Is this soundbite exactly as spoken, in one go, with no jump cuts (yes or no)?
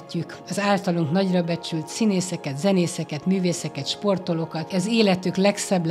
no